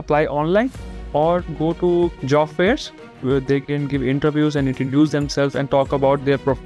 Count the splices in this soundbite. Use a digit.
2